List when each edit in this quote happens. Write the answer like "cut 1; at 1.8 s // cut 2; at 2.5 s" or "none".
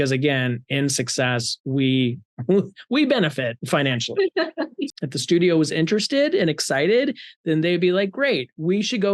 cut 1; at 4.9 s